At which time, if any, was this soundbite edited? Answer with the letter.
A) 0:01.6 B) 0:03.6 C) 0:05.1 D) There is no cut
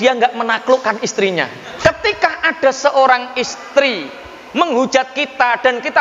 A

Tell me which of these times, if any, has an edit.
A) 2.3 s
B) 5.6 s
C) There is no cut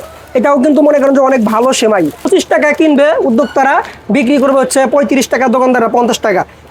A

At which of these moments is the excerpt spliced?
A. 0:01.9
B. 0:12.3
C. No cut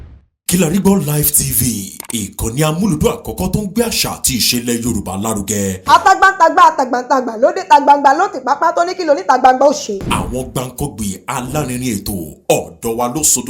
C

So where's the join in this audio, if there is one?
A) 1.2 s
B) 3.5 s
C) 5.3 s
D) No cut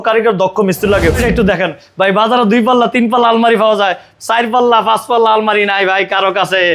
A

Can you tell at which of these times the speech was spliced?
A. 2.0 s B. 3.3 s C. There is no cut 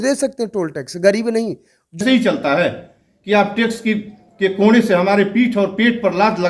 A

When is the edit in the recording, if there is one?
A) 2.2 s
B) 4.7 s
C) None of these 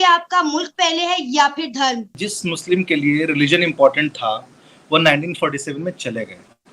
A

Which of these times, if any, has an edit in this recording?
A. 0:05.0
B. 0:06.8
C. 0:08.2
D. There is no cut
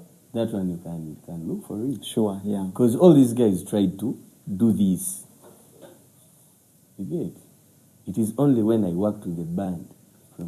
D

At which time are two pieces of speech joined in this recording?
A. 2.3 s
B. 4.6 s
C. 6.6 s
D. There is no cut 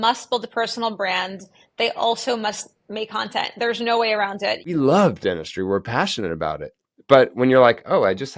B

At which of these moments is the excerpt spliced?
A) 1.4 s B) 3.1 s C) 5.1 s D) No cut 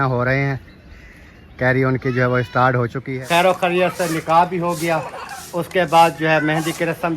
B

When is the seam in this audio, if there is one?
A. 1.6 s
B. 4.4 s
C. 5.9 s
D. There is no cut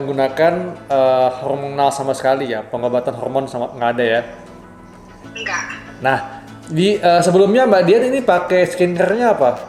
D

